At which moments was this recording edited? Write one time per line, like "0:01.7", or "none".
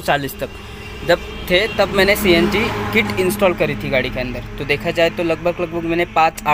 none